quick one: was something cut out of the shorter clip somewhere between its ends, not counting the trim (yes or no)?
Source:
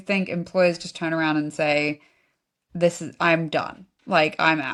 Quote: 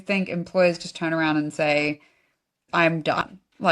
yes